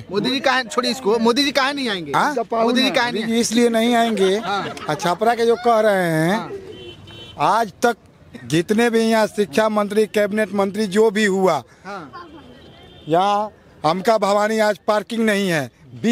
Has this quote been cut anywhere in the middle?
no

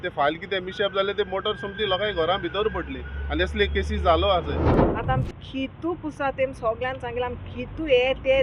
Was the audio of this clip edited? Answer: yes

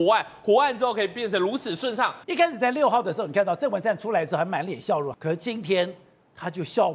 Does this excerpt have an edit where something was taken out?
yes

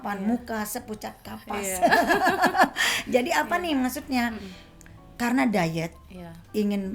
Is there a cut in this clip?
no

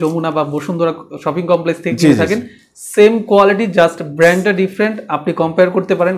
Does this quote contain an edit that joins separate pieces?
no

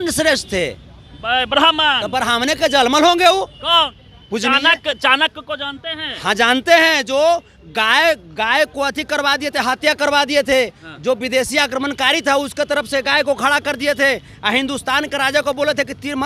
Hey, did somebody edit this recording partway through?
yes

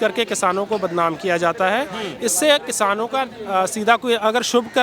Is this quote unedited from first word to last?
yes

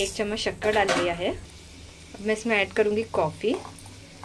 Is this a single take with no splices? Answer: yes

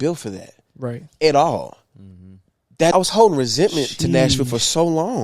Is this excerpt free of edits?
no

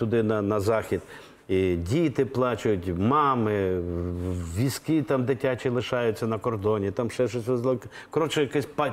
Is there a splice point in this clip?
no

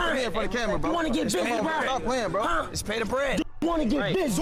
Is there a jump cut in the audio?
no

